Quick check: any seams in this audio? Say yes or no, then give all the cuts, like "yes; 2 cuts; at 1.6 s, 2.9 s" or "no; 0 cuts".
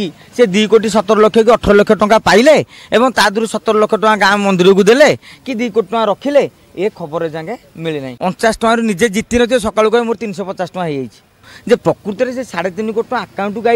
yes; 2 cuts; at 8.1 s, 11.5 s